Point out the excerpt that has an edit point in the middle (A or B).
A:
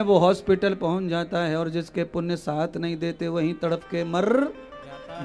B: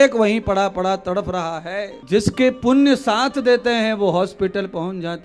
B